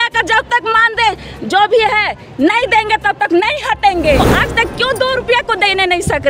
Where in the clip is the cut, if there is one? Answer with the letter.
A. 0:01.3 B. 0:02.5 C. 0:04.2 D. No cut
C